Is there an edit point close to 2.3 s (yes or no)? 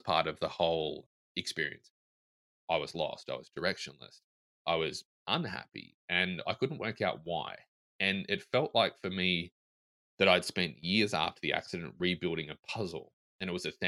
yes